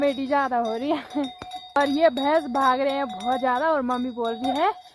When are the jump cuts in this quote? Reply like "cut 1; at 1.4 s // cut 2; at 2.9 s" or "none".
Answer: cut 1; at 1.8 s